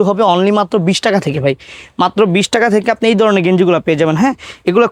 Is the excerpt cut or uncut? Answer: uncut